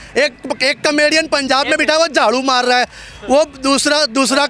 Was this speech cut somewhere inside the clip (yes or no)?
no